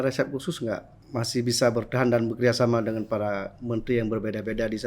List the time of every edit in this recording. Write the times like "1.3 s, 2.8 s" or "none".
0.9 s